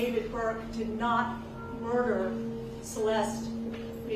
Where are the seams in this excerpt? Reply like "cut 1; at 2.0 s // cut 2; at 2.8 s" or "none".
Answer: none